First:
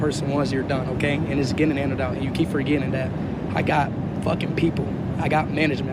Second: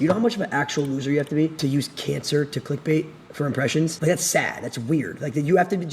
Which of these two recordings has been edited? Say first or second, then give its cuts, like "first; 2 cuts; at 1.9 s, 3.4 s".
second; 2 cuts; at 1.7 s, 4.0 s